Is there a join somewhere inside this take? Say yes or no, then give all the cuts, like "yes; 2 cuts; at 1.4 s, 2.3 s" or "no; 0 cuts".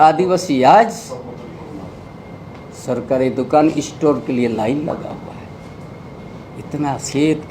no; 0 cuts